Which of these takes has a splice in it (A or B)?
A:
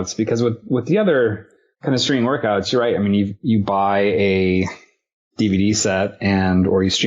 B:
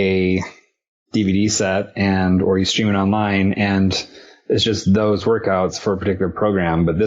A